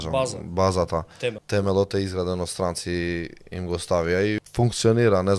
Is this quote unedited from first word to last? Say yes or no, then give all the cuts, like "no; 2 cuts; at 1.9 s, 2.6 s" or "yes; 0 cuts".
no; 2 cuts; at 1.4 s, 4.5 s